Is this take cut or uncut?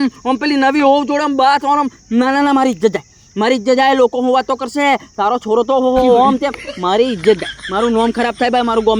uncut